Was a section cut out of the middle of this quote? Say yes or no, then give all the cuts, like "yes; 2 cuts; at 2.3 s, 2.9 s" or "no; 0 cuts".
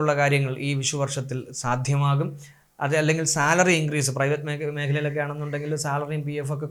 no; 0 cuts